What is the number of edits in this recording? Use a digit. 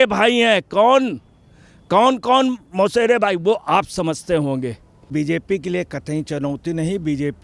1